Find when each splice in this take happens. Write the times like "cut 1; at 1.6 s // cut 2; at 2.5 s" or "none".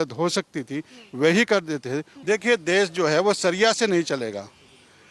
cut 1; at 2.1 s